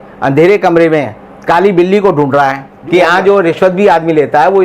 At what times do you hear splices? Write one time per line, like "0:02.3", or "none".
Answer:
0:02.7